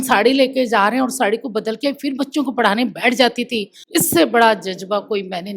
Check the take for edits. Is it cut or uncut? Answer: cut